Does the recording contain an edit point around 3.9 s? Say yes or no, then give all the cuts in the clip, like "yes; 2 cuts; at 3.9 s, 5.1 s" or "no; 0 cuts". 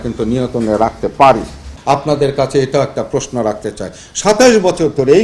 no; 1 cut; at 1.7 s